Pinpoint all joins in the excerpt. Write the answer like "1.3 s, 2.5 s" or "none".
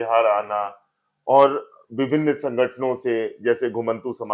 none